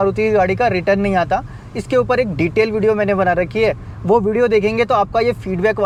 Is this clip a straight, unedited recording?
yes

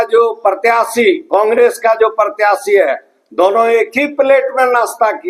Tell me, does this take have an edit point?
no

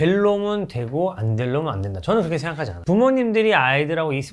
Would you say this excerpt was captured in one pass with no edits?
no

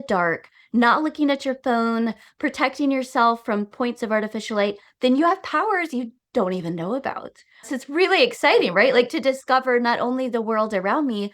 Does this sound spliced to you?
yes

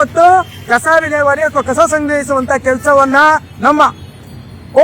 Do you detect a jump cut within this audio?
no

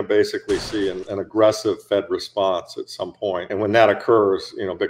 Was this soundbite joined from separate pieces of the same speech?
yes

